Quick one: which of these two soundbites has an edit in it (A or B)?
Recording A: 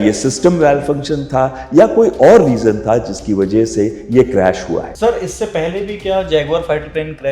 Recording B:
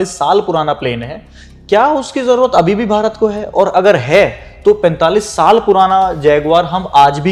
A